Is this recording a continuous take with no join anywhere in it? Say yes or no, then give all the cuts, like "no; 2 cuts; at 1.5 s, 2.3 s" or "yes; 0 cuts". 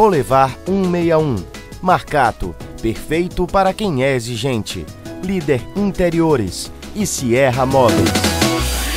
no; 1 cut; at 7.9 s